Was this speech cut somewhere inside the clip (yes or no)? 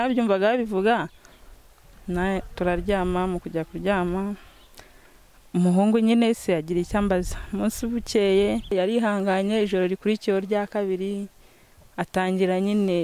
yes